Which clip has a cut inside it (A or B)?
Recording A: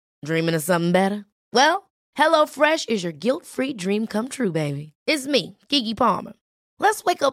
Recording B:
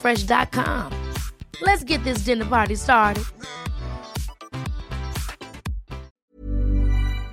B